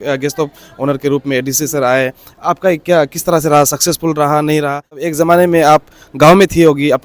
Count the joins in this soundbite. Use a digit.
1